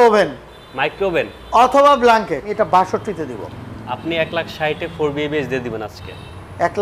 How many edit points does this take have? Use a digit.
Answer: 1